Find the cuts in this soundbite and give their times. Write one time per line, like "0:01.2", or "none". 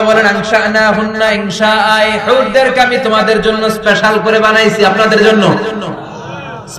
none

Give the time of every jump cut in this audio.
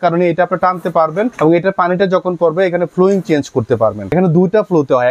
0:01.3
0:04.1

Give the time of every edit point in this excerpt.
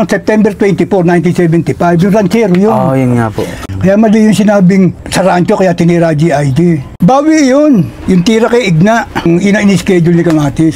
0:03.6
0:06.9
0:09.1

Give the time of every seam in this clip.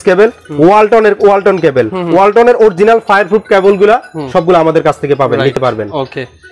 none

